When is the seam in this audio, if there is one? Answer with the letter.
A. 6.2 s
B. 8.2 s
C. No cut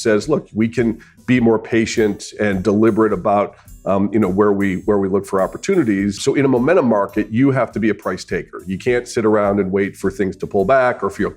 A